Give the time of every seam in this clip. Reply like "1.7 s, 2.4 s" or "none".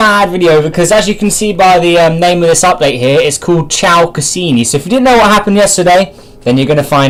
none